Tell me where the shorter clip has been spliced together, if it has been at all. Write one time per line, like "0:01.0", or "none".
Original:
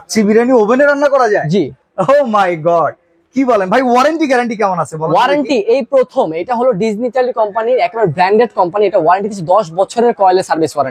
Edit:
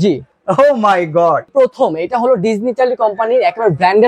0:01.5